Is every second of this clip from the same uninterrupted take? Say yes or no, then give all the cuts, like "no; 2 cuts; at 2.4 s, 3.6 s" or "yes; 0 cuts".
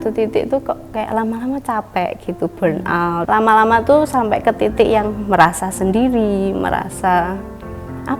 no; 1 cut; at 3.2 s